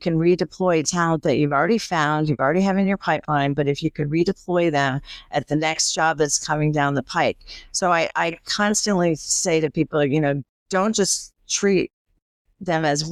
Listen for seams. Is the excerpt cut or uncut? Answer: uncut